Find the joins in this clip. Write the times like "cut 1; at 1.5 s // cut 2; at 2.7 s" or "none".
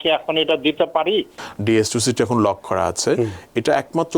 cut 1; at 1.4 s